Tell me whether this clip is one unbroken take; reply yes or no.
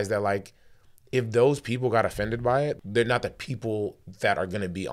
no